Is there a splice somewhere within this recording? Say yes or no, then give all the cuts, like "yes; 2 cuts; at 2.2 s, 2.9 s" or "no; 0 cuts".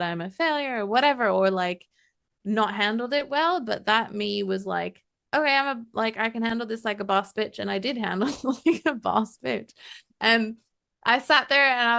no; 0 cuts